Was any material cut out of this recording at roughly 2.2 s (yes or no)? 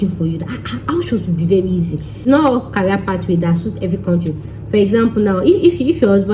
yes